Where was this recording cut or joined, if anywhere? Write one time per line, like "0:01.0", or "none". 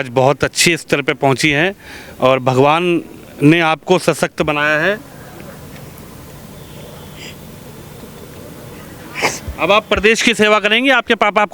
none

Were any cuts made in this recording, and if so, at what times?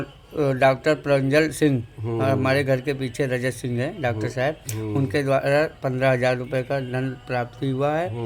none

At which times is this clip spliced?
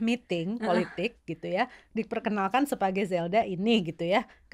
none

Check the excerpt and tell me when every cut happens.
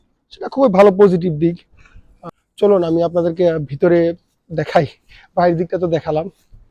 none

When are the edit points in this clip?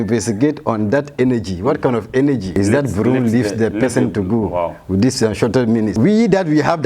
0:02.5
0:05.9

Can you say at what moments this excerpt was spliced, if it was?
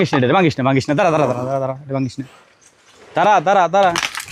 none

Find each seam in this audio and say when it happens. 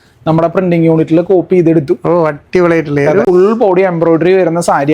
0:03.2

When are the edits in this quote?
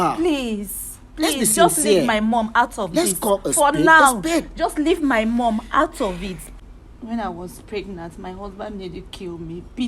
0:06.4

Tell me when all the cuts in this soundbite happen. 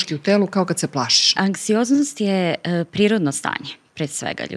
0:01.2

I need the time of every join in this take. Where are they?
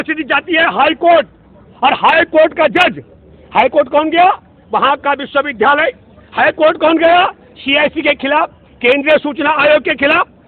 none

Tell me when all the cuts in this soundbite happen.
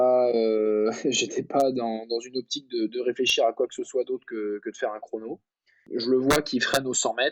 0:05.9

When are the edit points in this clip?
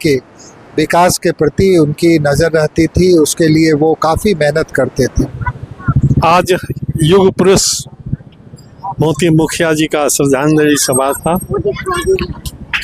0:05.1

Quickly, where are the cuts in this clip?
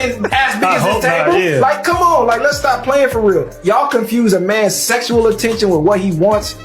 0:03.5

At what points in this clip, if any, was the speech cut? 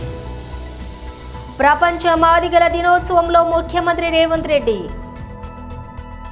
0:01.3

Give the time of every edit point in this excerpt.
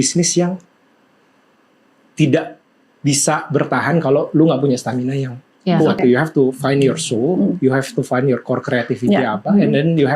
0:06.0

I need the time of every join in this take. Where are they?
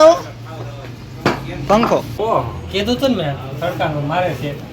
0:02.1

